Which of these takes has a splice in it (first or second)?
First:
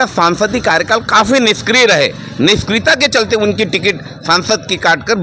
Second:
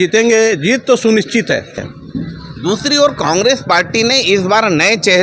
second